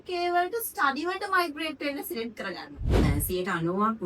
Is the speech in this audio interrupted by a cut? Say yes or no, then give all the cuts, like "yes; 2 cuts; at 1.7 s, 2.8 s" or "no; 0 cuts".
yes; 1 cut; at 2.9 s